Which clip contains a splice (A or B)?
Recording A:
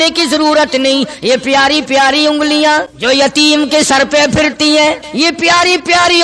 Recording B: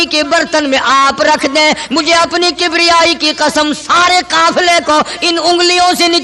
A